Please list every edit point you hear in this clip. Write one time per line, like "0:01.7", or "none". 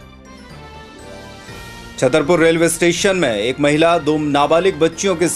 0:01.0